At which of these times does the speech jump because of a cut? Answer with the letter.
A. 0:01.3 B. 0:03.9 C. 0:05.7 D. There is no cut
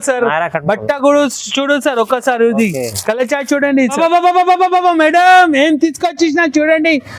B